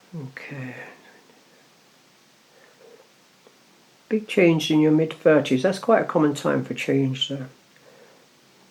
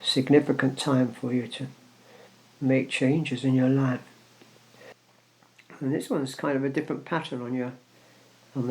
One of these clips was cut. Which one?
second; 1 cut; at 4.9 s

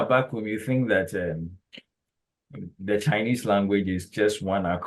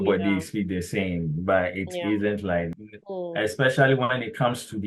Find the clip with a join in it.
second; 1 cut; at 2.7 s

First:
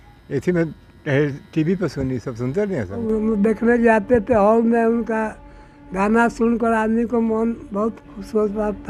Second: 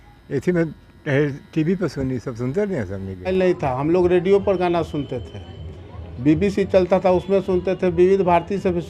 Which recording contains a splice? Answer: second; 1 cut; at 2.9 s

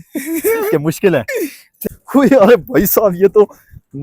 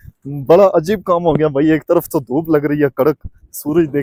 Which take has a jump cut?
first; 1 cut; at 1.8 s

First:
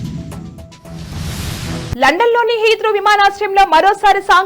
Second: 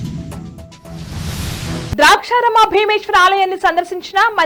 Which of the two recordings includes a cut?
first; 1 cut; at 1.6 s

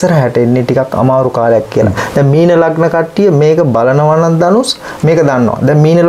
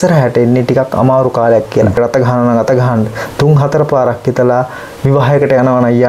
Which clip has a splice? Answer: second; 1 cut; at 2.0 s

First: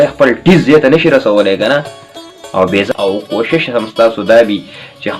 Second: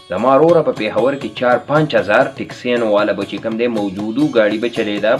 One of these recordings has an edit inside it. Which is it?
first; 1 cut; at 2.9 s

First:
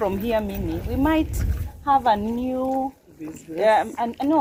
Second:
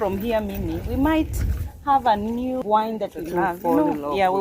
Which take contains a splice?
second; 1 cut; at 2.6 s

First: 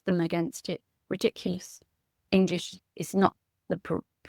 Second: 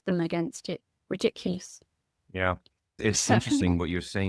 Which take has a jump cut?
first; 1 cut; at 2.3 s

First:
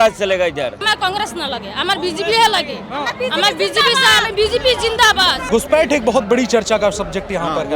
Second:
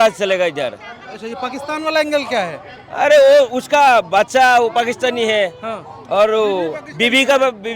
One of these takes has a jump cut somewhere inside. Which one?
first; 2 cuts; at 0.8 s, 5.4 s

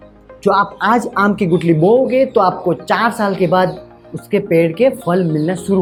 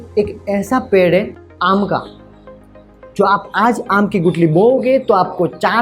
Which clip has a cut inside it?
second; 1 cut; at 1.4 s

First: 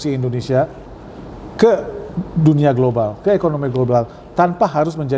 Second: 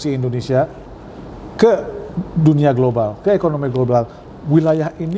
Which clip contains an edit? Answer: second; 1 cut; at 4.2 s

